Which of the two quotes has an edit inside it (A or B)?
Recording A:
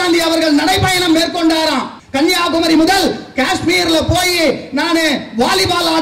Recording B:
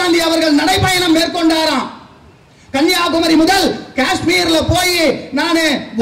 A